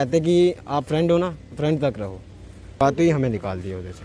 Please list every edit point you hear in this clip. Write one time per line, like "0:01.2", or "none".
0:02.8